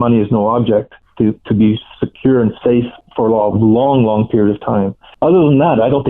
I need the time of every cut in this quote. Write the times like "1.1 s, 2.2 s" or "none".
1.0 s, 3.0 s, 5.0 s